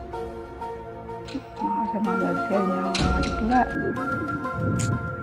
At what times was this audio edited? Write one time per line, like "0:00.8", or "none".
none